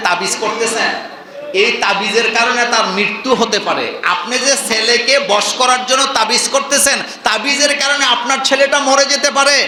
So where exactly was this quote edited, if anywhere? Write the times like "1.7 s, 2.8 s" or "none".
none